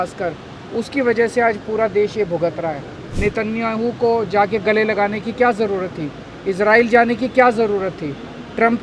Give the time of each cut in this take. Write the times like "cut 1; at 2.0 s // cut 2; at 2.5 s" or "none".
cut 1; at 3.0 s